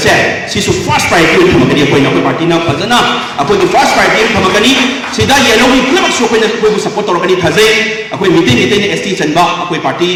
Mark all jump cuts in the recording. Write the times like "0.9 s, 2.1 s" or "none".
none